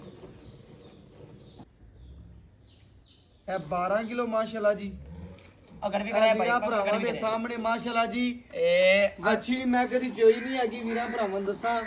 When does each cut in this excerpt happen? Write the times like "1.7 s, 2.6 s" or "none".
1.6 s